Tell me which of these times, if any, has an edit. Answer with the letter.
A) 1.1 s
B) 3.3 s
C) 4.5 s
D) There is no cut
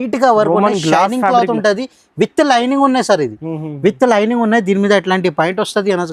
D